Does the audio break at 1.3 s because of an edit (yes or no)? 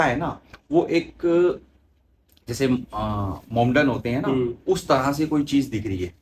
no